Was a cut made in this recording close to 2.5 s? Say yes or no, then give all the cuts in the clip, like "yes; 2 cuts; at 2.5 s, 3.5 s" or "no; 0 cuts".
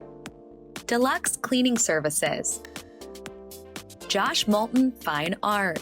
yes; 2 cuts; at 2.5 s, 4.1 s